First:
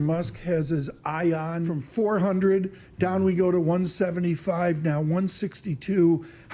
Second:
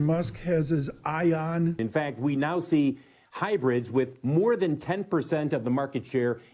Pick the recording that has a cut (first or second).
second